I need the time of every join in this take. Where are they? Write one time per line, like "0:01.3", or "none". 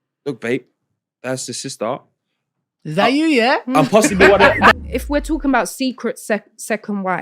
0:04.7

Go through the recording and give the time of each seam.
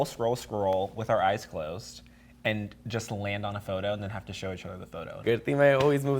0:05.2

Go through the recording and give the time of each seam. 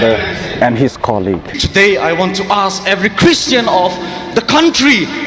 0:01.5

